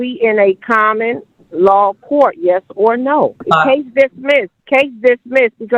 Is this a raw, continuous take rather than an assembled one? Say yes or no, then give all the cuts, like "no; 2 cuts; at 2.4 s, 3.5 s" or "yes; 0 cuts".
no; 2 cuts; at 3.4 s, 4.6 s